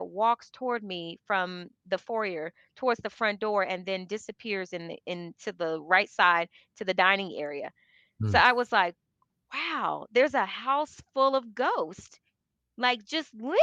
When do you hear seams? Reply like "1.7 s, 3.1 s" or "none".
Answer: none